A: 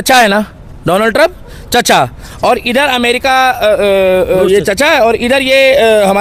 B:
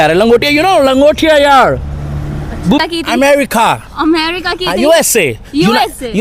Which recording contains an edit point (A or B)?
B